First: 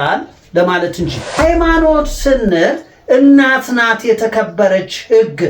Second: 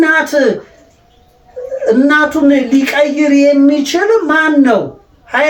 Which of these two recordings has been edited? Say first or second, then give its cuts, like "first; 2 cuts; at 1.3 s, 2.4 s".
first; 1 cut; at 1.2 s